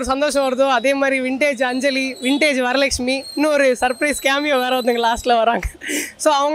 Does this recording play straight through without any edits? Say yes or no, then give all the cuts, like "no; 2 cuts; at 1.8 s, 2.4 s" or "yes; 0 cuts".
yes; 0 cuts